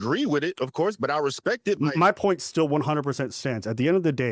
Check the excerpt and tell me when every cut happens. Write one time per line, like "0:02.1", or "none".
0:01.8

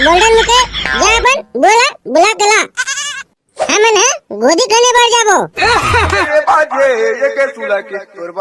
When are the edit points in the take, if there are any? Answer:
0:06.2

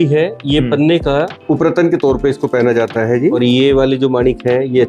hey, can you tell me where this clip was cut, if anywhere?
0:01.4
0:03.4

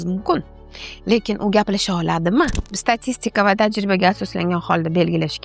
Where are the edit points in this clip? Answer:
0:02.7

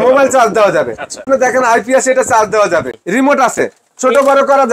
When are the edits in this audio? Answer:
0:01.2
0:03.0

